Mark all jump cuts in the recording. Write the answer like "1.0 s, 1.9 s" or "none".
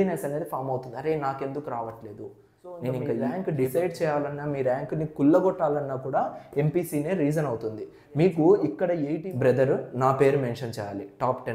3.3 s, 9.1 s

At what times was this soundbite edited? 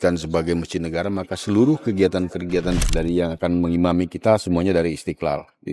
2.8 s

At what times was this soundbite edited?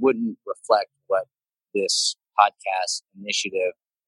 none

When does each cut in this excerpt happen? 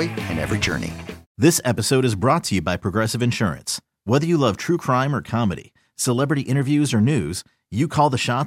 1.2 s

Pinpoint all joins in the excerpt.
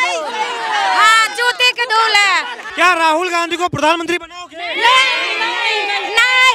2.6 s

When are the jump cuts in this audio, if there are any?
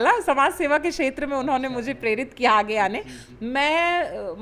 none

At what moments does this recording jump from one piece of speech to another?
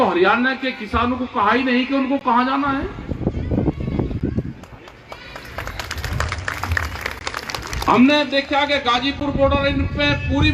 4.6 s

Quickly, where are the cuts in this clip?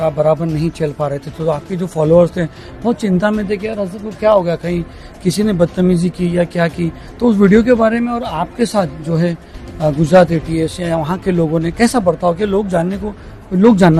none

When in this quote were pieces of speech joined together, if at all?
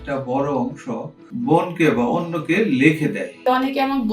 1.3 s, 3.3 s

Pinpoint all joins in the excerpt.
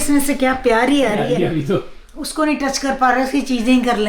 1.4 s

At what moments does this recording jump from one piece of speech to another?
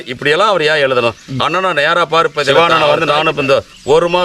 2.5 s

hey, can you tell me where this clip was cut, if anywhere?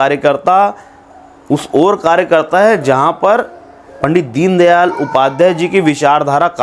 none

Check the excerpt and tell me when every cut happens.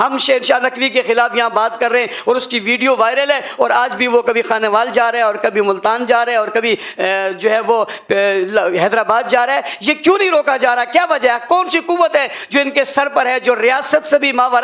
none

